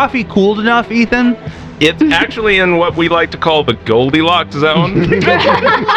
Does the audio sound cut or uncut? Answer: uncut